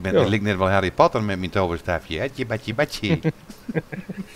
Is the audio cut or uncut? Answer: uncut